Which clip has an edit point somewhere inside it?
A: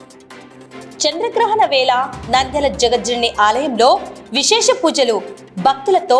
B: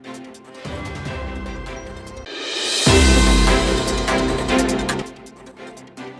A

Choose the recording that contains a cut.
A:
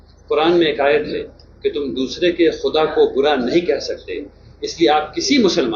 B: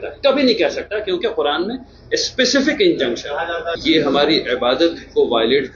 B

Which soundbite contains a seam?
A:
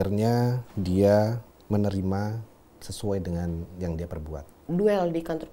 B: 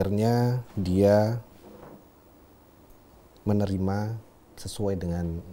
A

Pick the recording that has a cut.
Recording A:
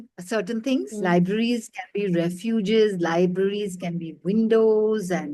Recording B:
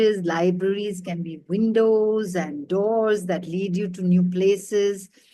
A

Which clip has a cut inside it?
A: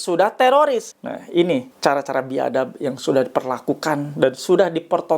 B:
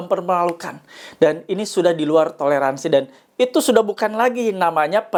A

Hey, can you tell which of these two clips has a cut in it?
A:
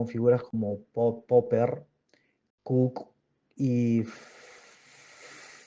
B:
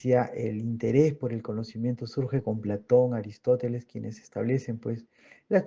B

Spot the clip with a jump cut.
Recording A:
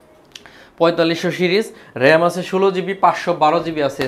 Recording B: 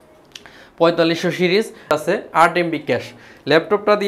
B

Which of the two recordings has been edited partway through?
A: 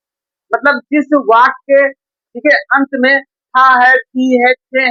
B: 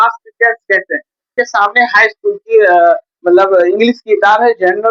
B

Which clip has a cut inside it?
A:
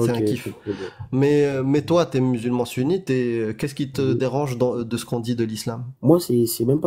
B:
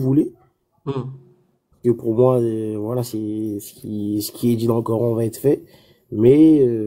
A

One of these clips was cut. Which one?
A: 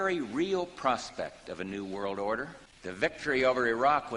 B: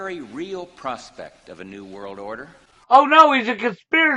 A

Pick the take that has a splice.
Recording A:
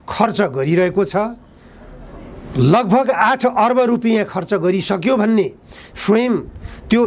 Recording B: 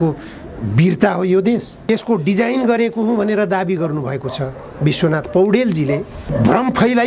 B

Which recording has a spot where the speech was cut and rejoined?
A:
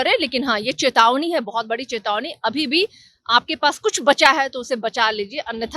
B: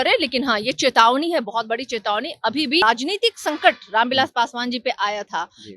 B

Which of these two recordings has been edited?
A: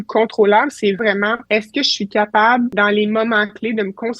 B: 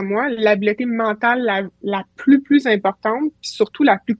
A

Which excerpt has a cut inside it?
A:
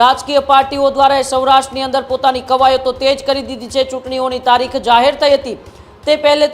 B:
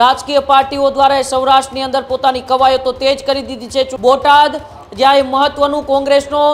B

